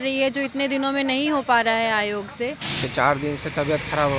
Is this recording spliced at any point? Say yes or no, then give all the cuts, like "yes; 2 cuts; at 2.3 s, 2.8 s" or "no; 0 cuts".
yes; 1 cut; at 2.8 s